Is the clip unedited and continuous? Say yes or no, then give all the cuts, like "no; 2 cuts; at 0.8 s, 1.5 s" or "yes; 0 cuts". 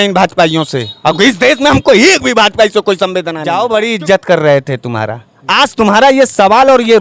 no; 1 cut; at 3.4 s